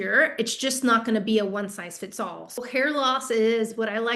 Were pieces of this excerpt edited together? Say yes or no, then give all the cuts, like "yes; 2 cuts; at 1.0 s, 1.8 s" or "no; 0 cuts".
yes; 1 cut; at 2.6 s